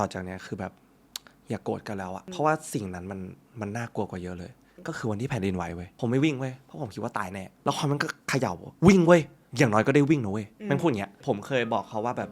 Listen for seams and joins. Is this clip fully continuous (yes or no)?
no